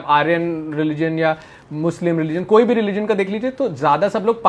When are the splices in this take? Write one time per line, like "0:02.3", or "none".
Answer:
none

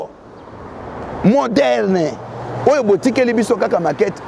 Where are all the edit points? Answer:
none

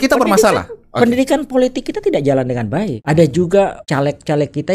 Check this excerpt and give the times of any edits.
0:03.0
0:03.8

